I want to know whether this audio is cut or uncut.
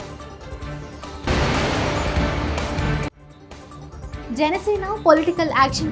uncut